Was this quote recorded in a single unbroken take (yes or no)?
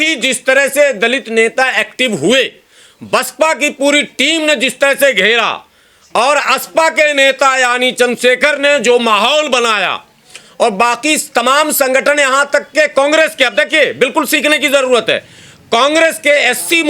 yes